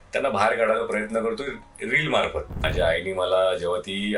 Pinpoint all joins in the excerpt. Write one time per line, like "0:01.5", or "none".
0:02.6